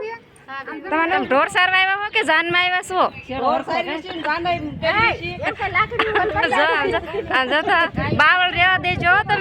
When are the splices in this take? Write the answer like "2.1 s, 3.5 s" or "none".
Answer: 1.1 s